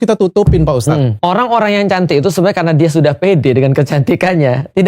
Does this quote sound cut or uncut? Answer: cut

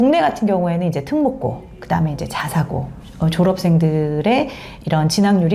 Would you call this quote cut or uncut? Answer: uncut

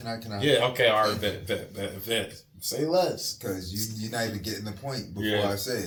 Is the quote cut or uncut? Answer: uncut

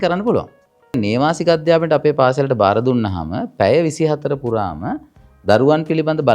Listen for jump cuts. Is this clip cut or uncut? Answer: cut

